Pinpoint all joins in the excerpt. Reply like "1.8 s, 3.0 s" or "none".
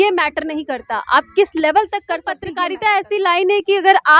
2.5 s